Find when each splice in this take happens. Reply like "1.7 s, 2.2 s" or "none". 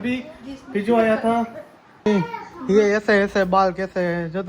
2.1 s